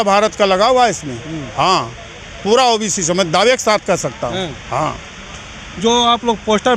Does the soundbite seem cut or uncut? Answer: uncut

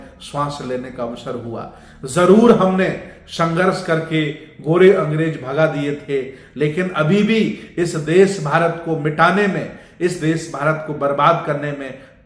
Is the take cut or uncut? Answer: uncut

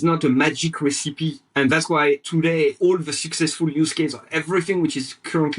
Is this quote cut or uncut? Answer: cut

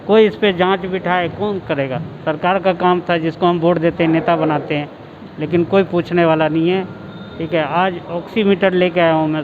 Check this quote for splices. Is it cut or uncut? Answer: uncut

